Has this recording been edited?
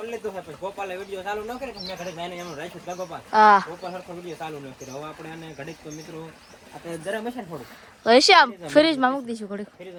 no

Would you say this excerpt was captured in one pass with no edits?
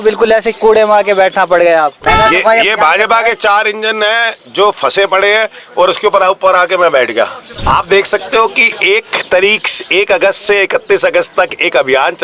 no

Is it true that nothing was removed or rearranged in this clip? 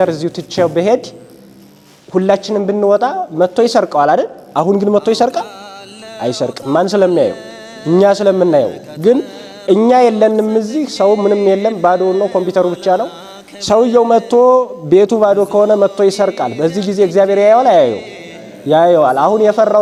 yes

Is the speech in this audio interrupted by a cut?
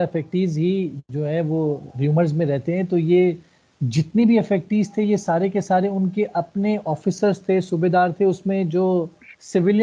no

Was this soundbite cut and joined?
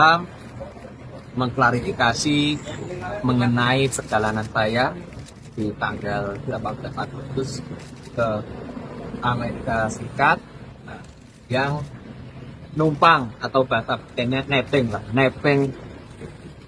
no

